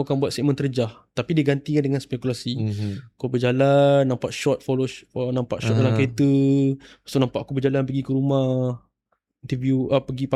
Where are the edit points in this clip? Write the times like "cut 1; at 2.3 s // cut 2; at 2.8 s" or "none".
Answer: none